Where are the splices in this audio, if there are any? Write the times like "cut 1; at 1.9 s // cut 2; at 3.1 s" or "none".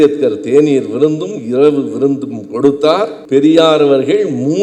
cut 1; at 3.2 s